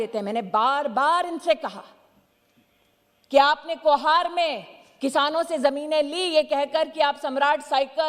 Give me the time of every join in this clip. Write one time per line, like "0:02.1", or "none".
none